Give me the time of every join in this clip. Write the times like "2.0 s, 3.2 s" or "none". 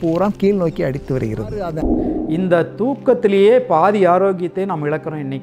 1.9 s